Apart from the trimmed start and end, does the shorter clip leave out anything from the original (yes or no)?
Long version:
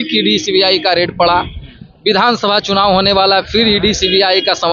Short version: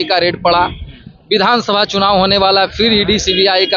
no